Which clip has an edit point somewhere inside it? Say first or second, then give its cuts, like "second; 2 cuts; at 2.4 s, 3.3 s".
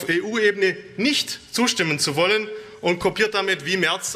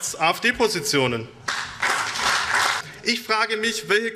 second; 1 cut; at 2.8 s